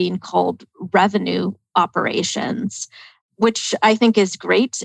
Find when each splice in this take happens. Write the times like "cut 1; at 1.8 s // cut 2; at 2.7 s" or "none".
cut 1; at 3.2 s